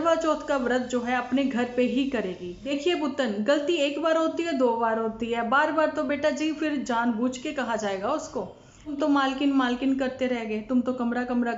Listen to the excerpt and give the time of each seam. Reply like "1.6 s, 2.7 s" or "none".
2.6 s, 8.9 s